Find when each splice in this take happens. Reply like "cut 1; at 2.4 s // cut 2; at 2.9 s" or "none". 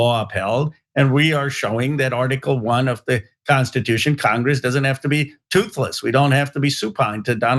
none